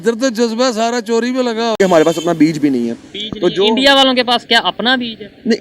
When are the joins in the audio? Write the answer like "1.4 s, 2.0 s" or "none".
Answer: 1.8 s